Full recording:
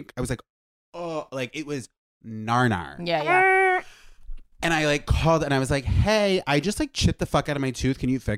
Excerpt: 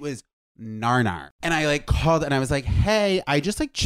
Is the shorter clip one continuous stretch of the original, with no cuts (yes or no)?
no